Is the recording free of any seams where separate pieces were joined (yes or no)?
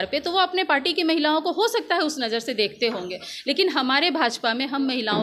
yes